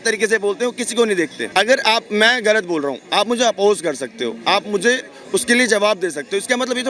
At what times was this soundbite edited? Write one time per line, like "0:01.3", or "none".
0:01.4

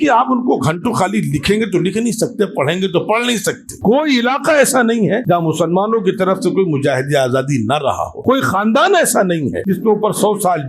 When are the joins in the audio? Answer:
0:03.7
0:05.2
0:08.1
0:09.6

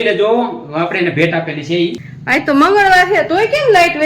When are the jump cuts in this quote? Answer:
0:02.1

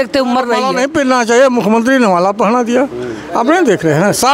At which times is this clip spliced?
0:01.0

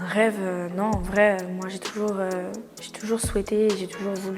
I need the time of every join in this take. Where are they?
none

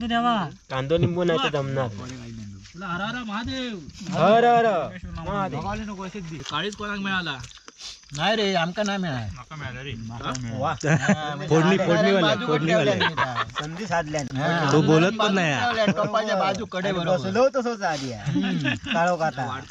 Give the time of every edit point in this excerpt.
0:06.4

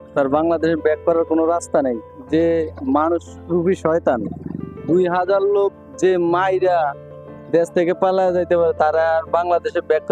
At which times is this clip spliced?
none

